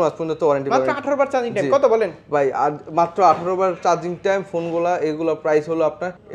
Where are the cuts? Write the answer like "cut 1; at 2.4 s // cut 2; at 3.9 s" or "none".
none